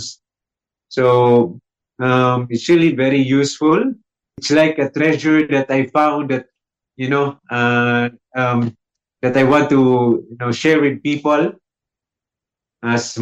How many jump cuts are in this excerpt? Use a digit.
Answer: 1